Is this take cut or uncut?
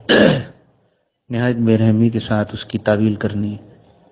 uncut